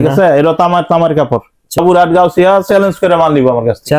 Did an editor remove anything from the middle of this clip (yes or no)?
yes